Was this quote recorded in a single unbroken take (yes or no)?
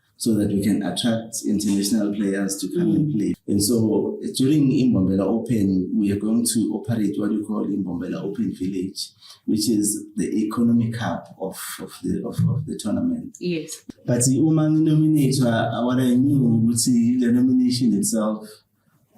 no